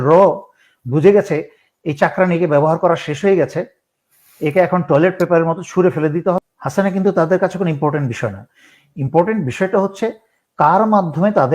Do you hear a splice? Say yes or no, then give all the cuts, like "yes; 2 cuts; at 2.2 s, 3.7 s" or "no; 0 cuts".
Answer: yes; 1 cut; at 6.5 s